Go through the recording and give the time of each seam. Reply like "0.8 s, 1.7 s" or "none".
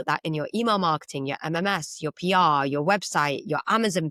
none

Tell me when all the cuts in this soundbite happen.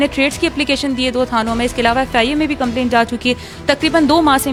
none

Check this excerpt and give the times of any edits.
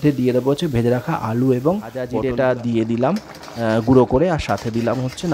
2.1 s

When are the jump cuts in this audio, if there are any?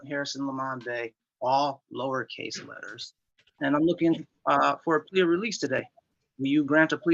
3.5 s

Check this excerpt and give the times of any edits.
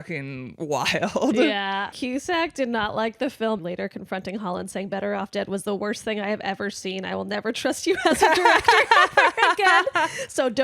1.9 s, 3.6 s

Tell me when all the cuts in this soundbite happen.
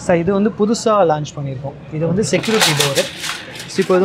none

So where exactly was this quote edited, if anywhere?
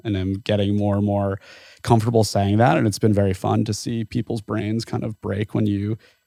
none

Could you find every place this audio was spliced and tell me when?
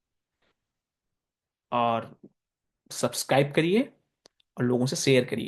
none

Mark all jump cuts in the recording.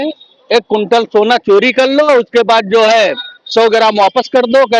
none

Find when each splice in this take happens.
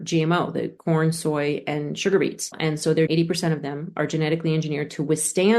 2.9 s

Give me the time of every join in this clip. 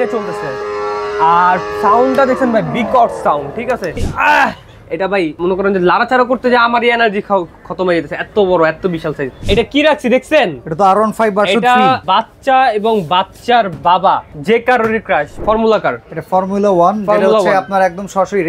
4.1 s, 5.3 s, 9.3 s, 12.0 s, 14.3 s, 15.3 s

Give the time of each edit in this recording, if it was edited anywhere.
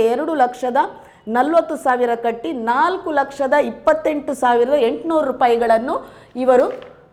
none

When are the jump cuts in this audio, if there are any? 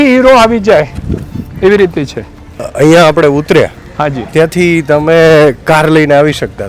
2.7 s

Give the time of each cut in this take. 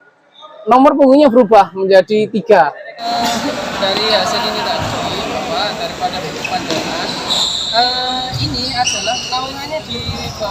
2.9 s

